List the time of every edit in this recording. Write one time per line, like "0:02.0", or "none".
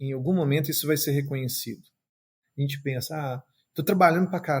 0:02.4